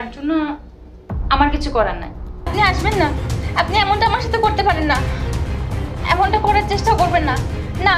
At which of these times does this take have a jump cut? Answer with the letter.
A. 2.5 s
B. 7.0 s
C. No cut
A